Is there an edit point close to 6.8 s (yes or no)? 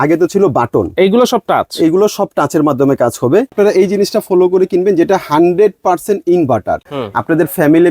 yes